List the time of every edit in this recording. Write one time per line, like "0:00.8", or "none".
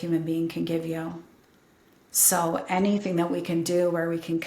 none

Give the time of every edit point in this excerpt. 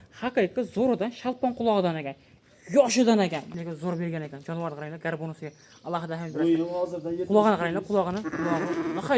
0:03.5

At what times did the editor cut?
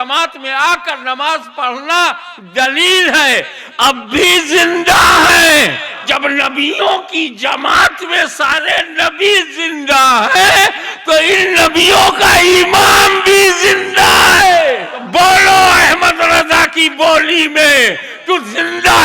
0:06.0
0:15.0

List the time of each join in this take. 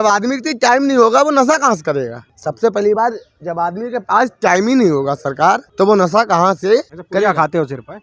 0:02.2
0:05.7
0:07.0

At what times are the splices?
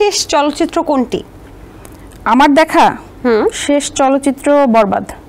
none

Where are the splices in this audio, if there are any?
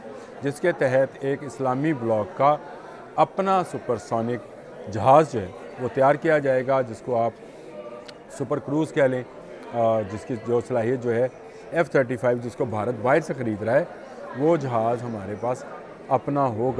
none

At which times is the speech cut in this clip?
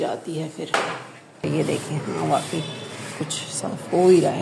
0:01.4

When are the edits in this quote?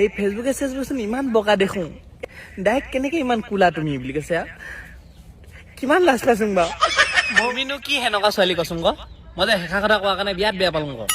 0:02.1
0:07.5

